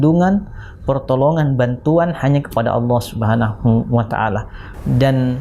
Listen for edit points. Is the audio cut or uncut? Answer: uncut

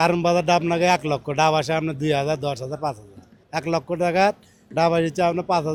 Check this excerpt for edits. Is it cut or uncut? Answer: uncut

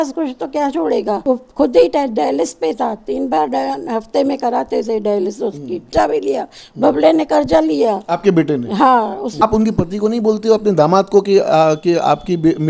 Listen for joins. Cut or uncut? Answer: cut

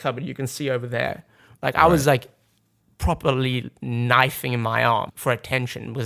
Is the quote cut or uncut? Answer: cut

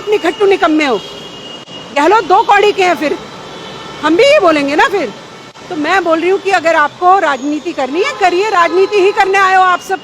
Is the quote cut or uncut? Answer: uncut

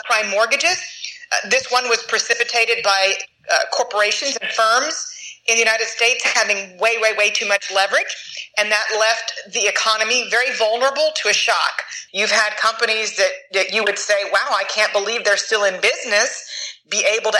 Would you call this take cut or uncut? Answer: cut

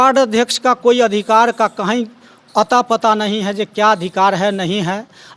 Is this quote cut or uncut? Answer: uncut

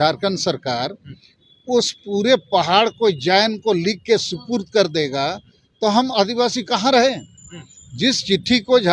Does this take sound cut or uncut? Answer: uncut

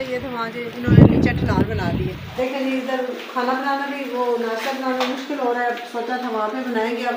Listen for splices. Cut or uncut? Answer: cut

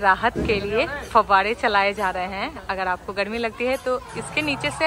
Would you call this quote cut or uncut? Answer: uncut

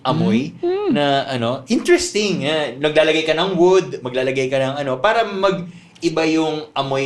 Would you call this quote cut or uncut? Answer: uncut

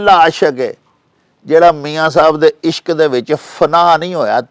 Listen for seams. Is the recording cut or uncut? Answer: uncut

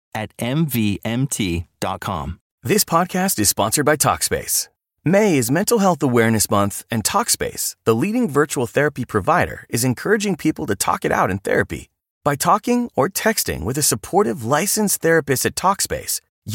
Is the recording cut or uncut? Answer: cut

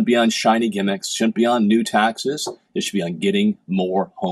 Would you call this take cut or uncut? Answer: uncut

